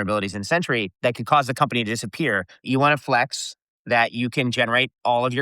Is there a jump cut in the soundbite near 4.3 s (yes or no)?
no